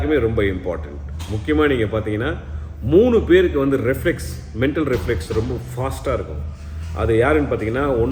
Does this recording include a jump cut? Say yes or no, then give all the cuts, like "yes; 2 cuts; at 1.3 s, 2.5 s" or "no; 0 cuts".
no; 0 cuts